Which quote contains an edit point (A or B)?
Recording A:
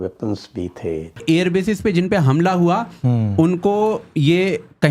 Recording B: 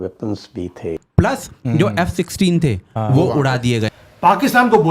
B